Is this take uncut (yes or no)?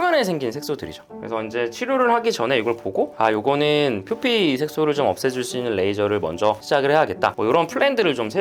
yes